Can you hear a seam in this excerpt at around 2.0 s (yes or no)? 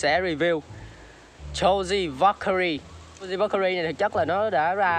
no